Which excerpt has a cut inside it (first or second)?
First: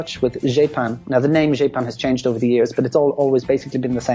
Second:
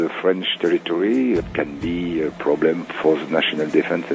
second